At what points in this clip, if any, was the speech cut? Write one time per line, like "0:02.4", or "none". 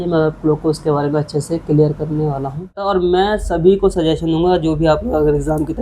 0:02.8